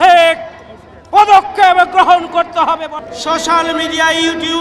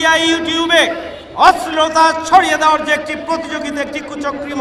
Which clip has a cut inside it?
first; 1 cut; at 3.0 s

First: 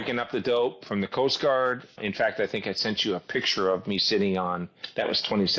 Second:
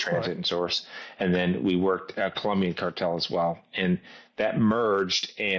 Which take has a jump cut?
first; 1 cut; at 2.0 s

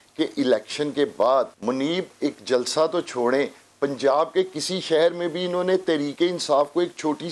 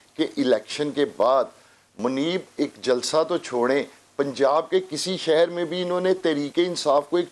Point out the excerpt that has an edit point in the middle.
first; 1 cut; at 1.6 s

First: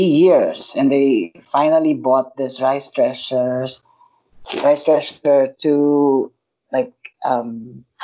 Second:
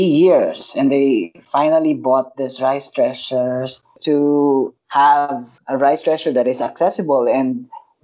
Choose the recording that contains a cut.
second; 2 cuts; at 4.0 s, 5.0 s

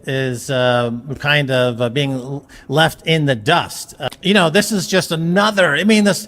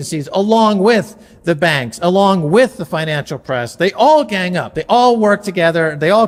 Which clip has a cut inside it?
first; 1 cut; at 3.9 s

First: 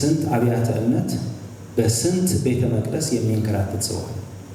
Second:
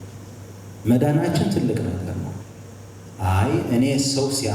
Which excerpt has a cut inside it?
second; 1 cut; at 2.4 s

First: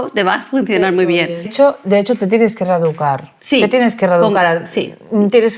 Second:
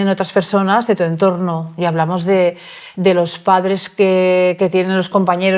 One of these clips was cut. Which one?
first; 1 cut; at 1.5 s

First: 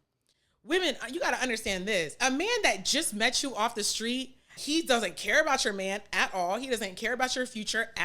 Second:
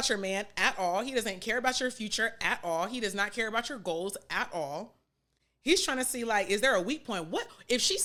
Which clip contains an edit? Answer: first; 2 cuts; at 2.2 s, 4.6 s

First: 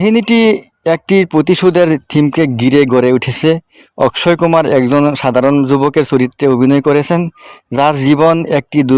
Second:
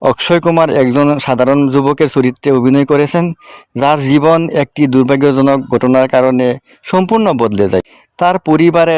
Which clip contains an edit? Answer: second; 1 cut; at 8.0 s

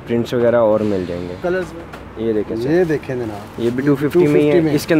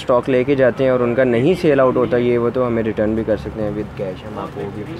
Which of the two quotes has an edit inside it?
first; 1 cut; at 1.6 s

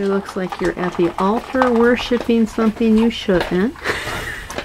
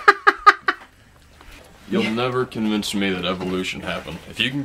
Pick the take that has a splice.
second; 1 cut; at 1.7 s

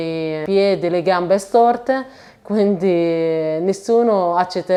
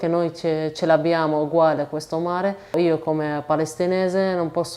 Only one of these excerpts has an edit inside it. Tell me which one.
second; 1 cut; at 2.7 s

